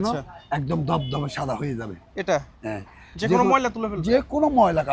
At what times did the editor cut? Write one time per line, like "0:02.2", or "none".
none